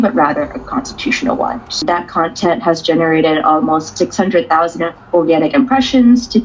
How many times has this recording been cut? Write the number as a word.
one